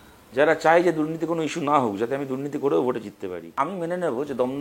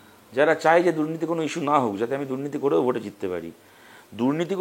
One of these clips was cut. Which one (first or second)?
first